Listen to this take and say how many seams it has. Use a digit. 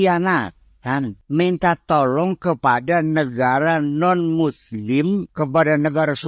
2